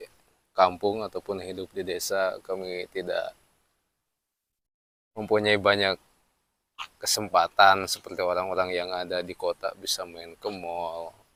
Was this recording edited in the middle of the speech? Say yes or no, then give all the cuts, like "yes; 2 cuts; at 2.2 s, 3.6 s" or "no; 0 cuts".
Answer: no; 0 cuts